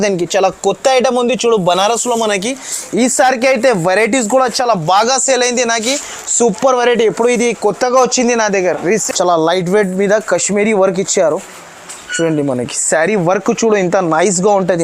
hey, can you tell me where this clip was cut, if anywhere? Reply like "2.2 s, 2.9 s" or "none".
9.0 s